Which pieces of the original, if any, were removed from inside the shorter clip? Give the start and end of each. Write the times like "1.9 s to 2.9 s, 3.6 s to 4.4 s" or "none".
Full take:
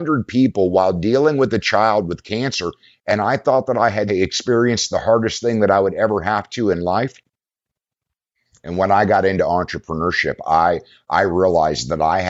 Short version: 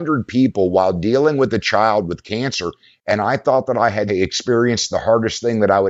none